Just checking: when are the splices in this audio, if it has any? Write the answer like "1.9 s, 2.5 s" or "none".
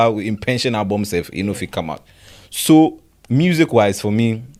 none